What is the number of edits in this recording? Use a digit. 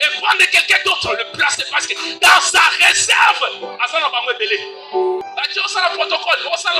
1